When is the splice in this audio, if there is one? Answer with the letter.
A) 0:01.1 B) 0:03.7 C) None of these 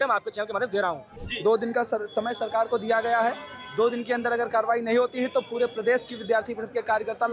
A